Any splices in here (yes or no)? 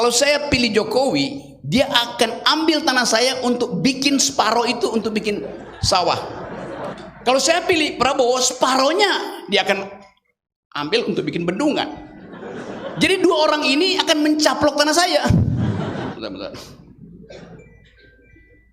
yes